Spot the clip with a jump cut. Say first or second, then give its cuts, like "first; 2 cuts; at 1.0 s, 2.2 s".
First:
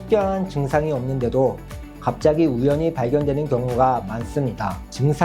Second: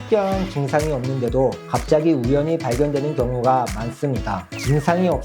second; 1 cut; at 1.6 s